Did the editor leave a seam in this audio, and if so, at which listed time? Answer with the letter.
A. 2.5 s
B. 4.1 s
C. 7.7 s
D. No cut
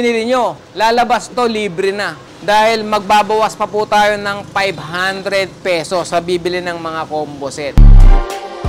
C